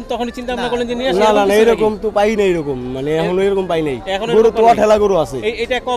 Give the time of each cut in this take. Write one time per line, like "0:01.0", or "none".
none

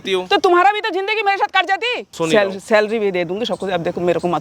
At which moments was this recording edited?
0:02.1

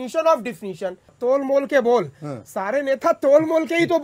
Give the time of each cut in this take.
0:01.1

